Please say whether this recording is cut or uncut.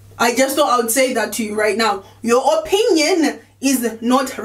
uncut